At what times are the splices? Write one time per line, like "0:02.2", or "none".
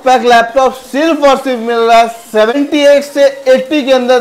0:02.5